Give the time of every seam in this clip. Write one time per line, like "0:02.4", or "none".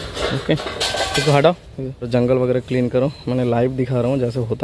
0:02.1